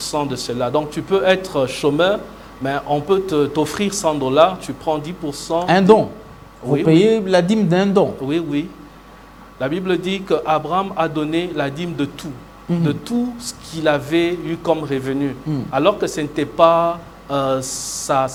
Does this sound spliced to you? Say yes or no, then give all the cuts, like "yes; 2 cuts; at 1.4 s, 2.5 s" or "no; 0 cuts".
no; 0 cuts